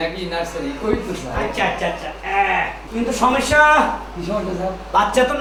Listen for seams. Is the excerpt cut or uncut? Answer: uncut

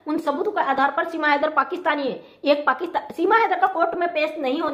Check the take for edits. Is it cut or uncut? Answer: uncut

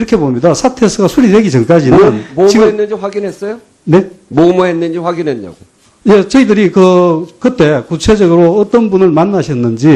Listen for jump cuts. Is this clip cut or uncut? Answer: uncut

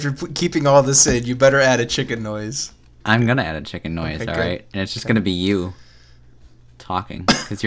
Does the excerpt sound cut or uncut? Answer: uncut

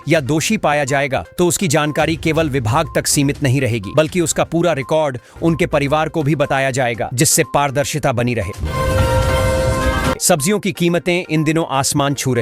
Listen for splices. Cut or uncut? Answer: cut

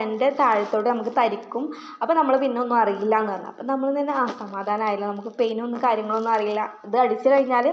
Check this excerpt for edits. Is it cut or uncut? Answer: uncut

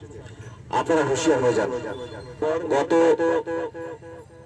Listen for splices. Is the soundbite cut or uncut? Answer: cut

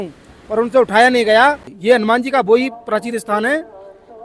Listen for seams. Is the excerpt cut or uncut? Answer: cut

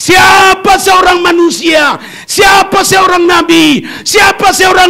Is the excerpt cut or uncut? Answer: uncut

